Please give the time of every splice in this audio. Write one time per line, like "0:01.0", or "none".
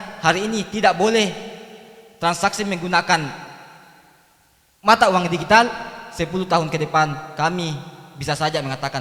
none